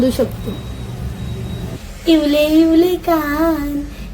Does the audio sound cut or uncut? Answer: cut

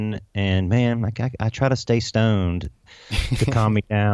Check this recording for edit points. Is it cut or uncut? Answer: uncut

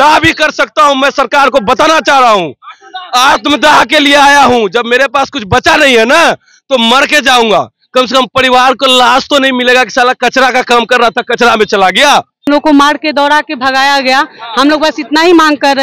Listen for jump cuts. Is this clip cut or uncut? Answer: cut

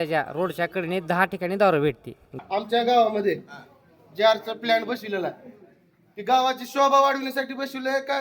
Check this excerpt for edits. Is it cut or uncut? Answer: cut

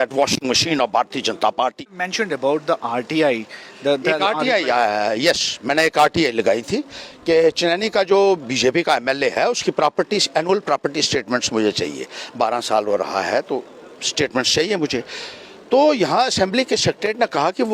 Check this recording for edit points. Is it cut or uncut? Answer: cut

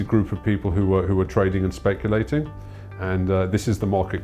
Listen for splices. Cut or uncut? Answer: cut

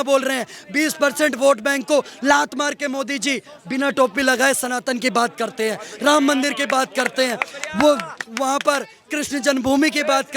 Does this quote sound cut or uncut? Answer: uncut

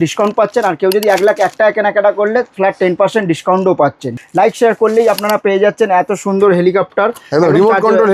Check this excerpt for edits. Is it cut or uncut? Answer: cut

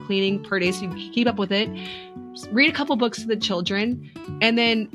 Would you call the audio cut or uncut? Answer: uncut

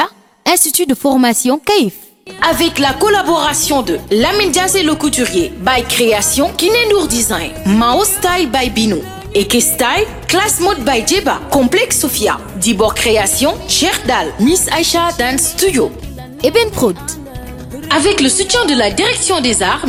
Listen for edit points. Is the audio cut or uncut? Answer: uncut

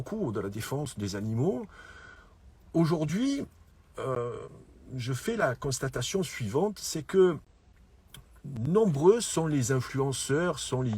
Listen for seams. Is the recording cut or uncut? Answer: uncut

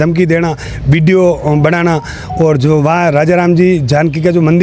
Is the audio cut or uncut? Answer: uncut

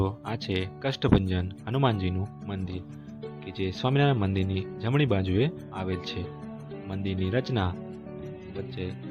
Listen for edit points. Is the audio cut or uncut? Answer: uncut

